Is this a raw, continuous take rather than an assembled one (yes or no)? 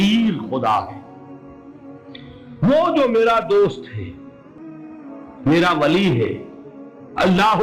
no